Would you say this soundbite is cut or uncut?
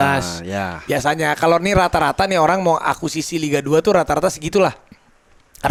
uncut